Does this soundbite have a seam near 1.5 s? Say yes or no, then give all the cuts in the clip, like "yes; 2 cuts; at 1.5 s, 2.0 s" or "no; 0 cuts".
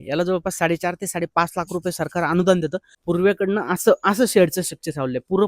no; 1 cut; at 2.9 s